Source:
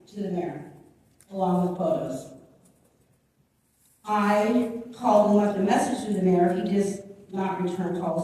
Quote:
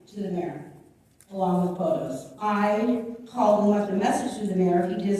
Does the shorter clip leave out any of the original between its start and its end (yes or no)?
yes